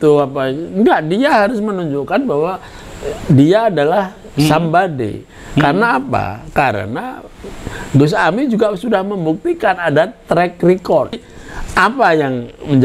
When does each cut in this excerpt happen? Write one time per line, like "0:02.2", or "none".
0:11.2